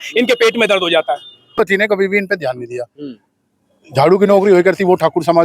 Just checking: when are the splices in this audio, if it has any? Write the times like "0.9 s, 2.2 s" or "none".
1.6 s